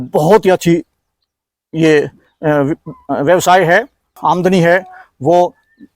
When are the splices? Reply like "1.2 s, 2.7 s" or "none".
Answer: 4.1 s